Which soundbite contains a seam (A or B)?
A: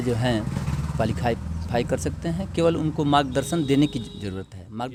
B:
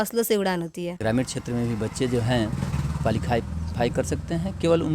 B